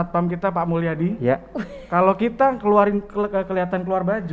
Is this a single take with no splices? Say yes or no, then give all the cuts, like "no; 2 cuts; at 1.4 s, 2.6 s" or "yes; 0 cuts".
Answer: yes; 0 cuts